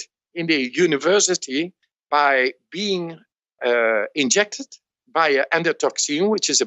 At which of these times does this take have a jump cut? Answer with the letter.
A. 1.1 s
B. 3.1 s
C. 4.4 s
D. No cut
D